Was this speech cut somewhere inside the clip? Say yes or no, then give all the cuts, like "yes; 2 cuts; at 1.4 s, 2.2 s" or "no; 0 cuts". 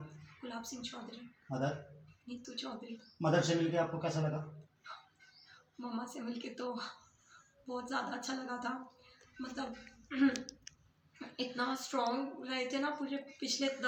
no; 0 cuts